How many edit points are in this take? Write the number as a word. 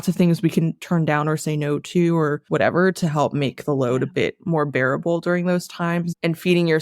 one